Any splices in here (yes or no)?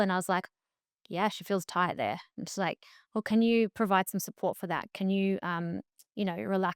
no